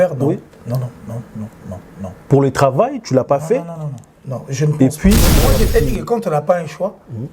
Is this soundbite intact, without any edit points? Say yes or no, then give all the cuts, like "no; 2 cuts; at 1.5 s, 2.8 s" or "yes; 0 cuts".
no; 1 cut; at 5.4 s